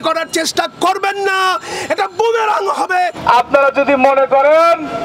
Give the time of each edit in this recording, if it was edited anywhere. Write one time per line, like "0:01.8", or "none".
0:03.2